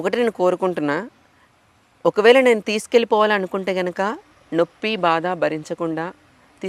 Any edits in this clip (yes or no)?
no